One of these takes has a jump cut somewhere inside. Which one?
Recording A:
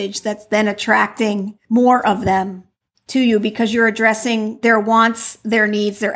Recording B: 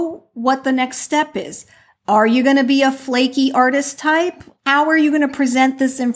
A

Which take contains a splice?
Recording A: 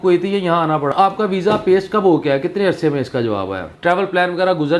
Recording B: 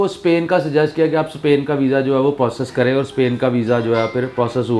A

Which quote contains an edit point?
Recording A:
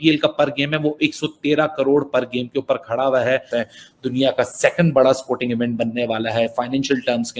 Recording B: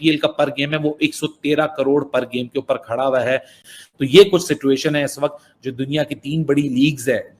A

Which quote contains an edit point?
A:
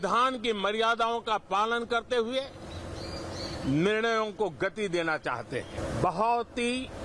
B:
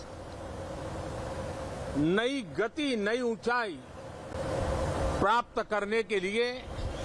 A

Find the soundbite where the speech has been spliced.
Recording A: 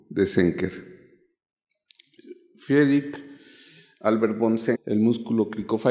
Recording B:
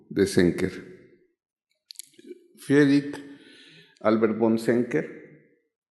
B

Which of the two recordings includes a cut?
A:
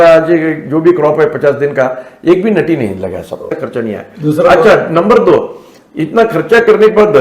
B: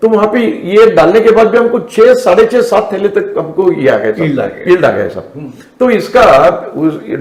A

